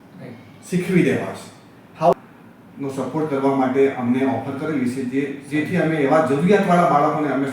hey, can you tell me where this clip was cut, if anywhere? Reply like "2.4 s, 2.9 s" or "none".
2.1 s